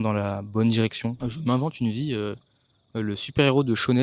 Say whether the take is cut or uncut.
cut